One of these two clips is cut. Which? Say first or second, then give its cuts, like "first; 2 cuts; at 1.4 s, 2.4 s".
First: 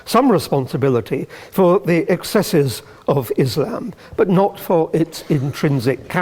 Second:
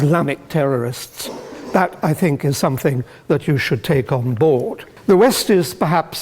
second; 1 cut; at 4.9 s